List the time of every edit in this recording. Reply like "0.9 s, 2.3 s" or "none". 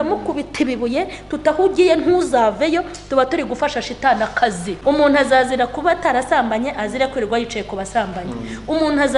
4.7 s